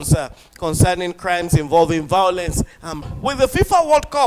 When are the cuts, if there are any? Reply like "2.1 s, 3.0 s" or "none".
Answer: 3.0 s